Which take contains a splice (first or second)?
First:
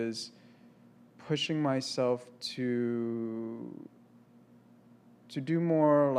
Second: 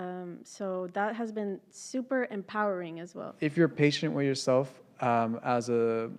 second